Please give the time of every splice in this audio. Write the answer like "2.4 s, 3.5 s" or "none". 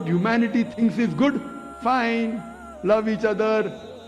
1.6 s